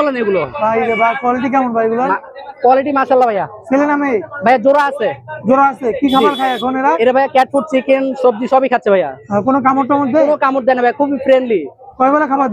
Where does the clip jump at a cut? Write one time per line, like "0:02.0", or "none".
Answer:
none